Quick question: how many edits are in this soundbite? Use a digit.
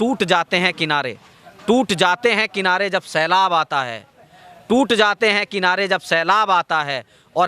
0